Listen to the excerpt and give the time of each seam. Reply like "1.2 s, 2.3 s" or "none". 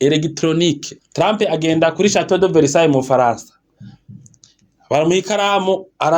0.9 s